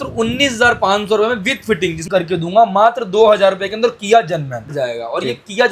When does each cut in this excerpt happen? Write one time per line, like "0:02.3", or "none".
0:02.0
0:04.7

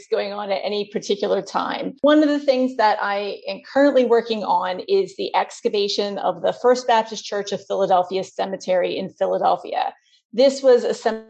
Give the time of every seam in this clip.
none

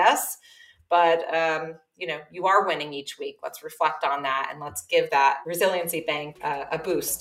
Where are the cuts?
0:05.4
0:06.3

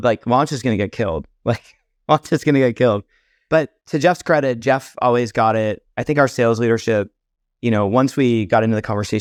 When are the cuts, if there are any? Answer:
none

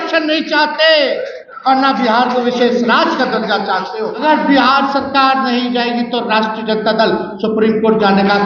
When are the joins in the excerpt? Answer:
0:04.2

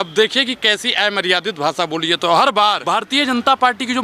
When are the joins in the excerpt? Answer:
0:02.8

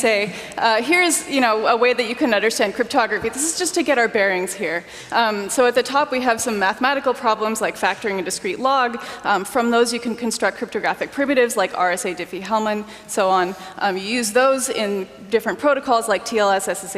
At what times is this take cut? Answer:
0:05.3

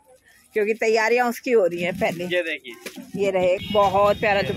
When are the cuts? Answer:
0:03.6

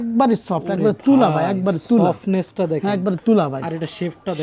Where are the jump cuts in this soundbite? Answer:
none

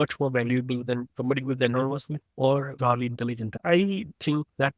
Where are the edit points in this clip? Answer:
0:02.2
0:03.5

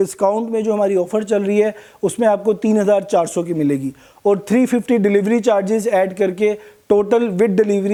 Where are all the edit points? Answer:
none

